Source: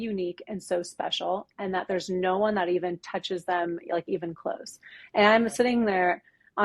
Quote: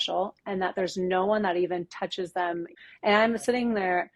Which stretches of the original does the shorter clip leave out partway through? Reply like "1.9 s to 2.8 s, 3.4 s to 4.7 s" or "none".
3.8 s to 4.8 s